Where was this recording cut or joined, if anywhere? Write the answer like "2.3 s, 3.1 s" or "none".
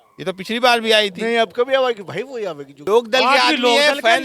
2.7 s